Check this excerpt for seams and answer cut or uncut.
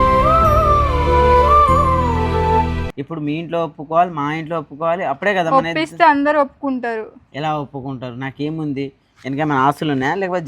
cut